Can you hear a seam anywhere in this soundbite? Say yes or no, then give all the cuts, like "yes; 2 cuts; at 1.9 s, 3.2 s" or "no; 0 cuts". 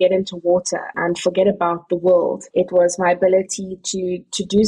yes; 2 cuts; at 0.9 s, 2.4 s